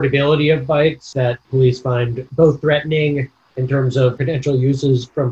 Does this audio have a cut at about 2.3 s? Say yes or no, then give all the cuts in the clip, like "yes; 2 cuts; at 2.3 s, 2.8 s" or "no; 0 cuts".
yes; 3 cuts; at 1.3 s, 2.3 s, 4.2 s